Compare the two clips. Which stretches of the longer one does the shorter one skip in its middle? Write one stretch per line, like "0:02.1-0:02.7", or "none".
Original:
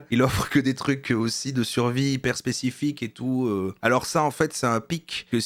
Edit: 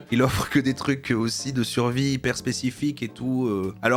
none